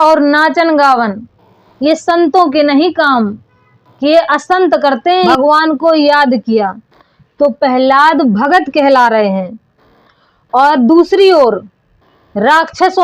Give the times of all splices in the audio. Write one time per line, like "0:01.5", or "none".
0:05.3